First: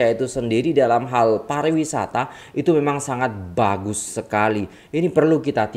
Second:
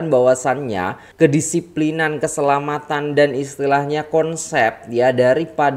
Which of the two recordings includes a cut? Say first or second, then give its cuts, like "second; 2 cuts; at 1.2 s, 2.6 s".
second; 1 cut; at 1.0 s